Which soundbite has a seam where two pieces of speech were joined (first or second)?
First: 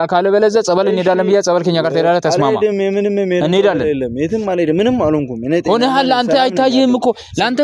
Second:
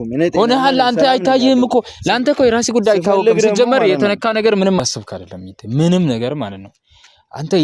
second